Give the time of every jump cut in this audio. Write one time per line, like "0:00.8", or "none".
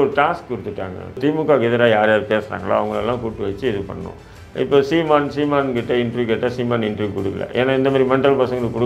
0:01.2